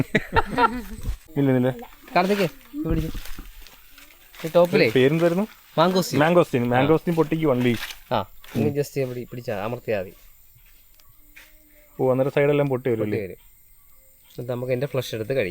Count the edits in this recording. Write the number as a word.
one